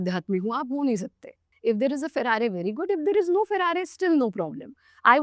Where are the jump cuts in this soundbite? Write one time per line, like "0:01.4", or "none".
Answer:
0:01.5